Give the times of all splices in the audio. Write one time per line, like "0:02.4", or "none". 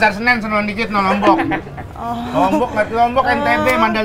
none

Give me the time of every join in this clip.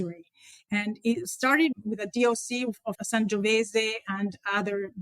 0:01.7
0:03.0

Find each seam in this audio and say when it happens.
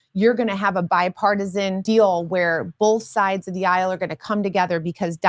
0:01.8

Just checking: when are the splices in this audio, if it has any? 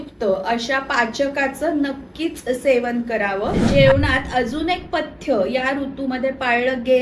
0:03.6

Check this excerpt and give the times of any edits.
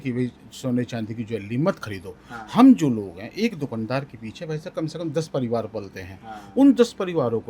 none

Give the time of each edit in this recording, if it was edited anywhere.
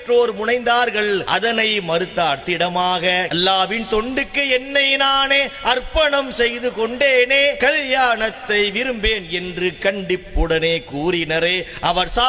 0:01.2
0:03.3
0:07.6

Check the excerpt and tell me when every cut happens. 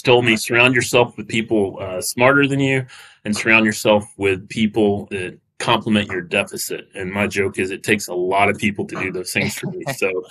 none

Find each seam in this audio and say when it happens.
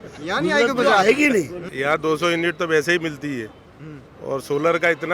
0:01.6

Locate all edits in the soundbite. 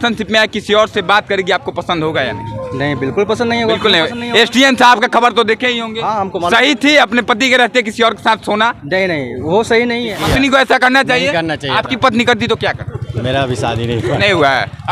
0:10.1

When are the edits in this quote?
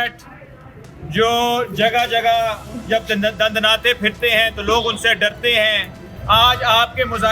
0:06.1

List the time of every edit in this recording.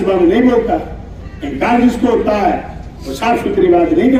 none

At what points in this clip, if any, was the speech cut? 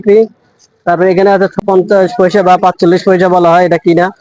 0:01.6

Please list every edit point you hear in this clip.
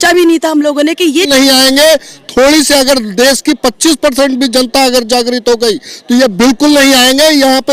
0:01.3

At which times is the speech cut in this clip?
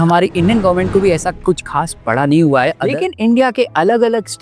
0:02.8

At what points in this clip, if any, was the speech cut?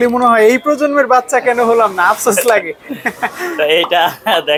none

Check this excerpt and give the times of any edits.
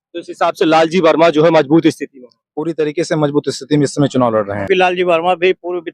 0:04.6

